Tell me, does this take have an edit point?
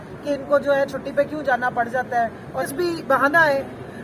yes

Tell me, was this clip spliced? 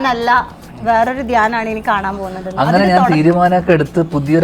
no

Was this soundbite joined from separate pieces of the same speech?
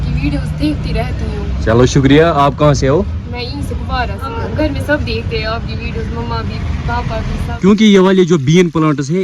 yes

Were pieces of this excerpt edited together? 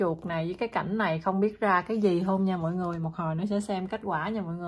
no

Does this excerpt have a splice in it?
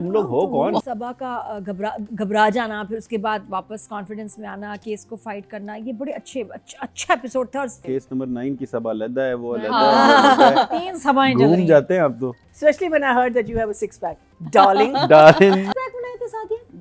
yes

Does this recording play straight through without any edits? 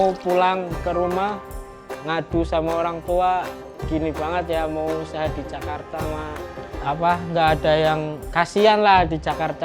no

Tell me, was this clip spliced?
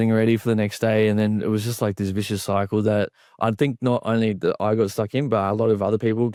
no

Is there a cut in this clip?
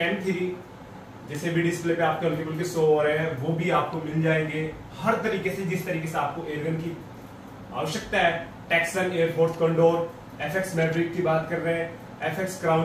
no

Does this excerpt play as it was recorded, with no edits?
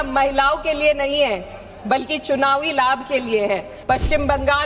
no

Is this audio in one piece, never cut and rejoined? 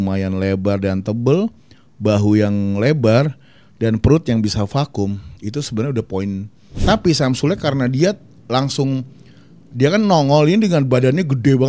no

